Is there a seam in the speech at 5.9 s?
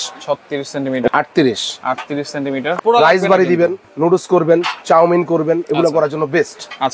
no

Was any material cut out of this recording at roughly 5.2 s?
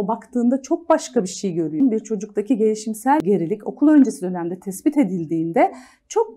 no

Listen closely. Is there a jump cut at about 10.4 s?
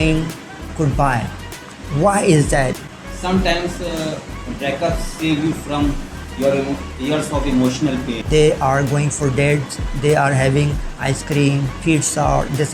no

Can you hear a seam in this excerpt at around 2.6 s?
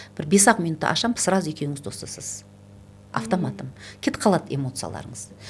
no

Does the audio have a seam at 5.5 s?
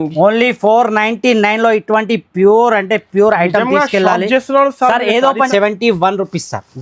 yes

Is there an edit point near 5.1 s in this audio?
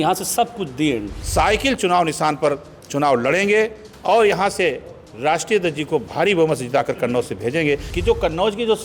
no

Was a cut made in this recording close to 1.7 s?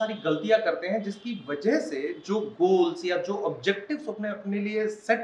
no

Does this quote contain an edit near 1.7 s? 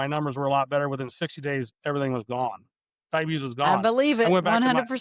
no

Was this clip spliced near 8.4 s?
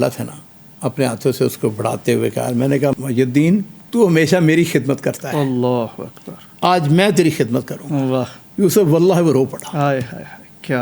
yes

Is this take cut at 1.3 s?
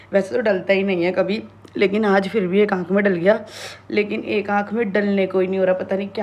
no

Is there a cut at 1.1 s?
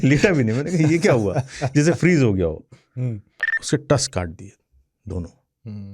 no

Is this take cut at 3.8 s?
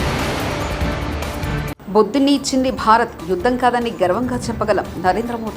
no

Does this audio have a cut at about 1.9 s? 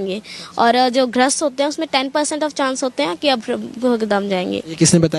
no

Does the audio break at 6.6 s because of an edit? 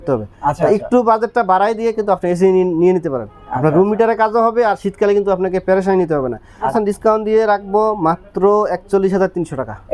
yes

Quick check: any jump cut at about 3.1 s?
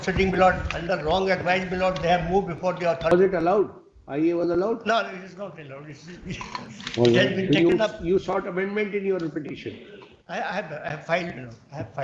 yes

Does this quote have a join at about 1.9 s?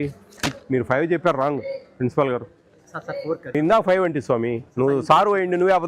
no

